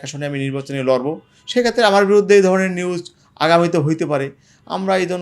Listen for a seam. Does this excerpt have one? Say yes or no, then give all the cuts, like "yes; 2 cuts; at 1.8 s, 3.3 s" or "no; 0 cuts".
no; 0 cuts